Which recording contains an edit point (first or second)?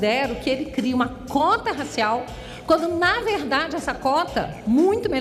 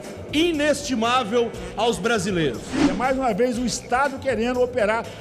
second